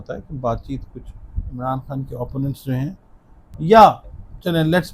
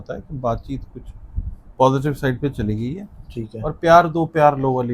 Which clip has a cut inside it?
first; 1 cut; at 1.4 s

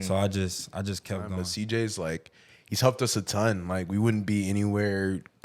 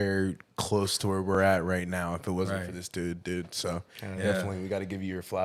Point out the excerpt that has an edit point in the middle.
first; 1 cut; at 1.4 s

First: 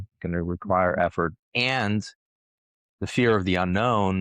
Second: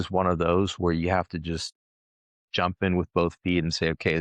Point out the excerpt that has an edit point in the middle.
first; 1 cut; at 1.4 s

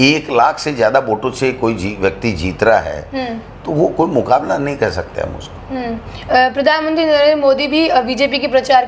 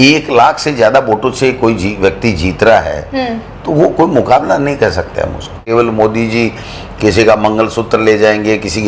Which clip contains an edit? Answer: second; 1 cut; at 5.6 s

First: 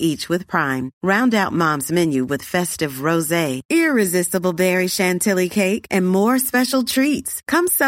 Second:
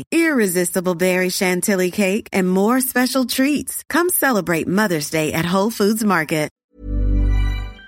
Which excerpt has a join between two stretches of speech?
second; 1 cut; at 6.6 s

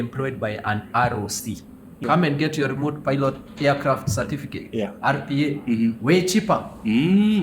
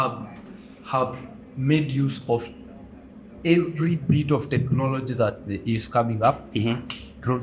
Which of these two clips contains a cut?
first; 1 cut; at 1.9 s

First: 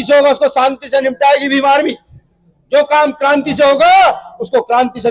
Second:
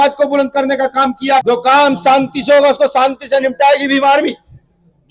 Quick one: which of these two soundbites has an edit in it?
second; 1 cut; at 1.4 s

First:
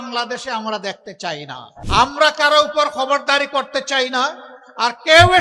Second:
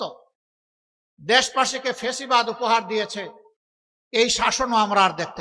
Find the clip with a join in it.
first; 1 cut; at 1.7 s

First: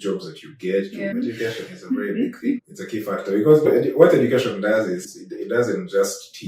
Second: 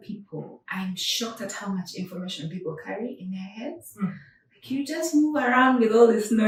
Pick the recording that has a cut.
first; 1 cut; at 1.1 s

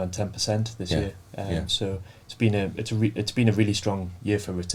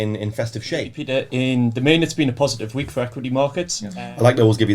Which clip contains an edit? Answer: second; 2 cuts; at 1.0 s, 3.8 s

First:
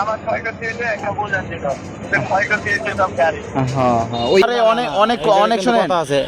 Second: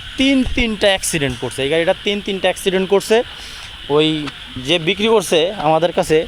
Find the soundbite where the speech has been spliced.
first; 1 cut; at 4.4 s

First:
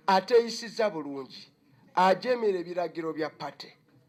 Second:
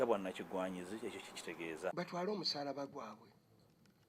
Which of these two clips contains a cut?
second; 1 cut; at 1.9 s

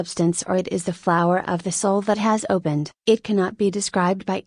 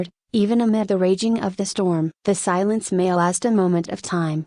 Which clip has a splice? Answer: second; 1 cut; at 2.4 s

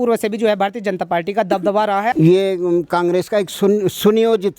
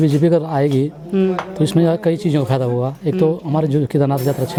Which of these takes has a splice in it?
first; 1 cut; at 2.1 s

